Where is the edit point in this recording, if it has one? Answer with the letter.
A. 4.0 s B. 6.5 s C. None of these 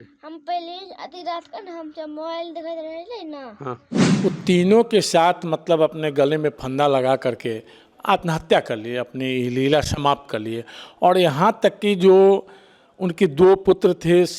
A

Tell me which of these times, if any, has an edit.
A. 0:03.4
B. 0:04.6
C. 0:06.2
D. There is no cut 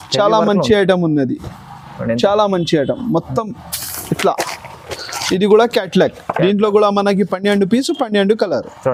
D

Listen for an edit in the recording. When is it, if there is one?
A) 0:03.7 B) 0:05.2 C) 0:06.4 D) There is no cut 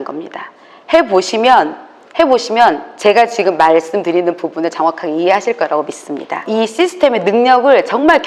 C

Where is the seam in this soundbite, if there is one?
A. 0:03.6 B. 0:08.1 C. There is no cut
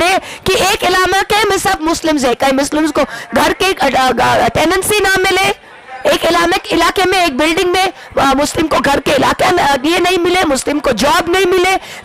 C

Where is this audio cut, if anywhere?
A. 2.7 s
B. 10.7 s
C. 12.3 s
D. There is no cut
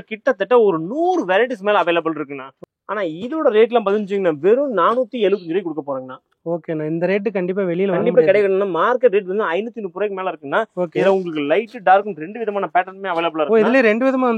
A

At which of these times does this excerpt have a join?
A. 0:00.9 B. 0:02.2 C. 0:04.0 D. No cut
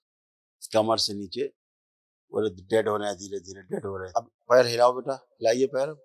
C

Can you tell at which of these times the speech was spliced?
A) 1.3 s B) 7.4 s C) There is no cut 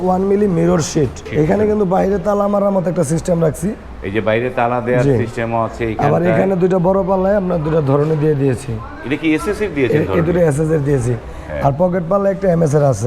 A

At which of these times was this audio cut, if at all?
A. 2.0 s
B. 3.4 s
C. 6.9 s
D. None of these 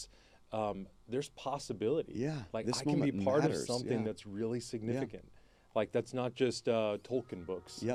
D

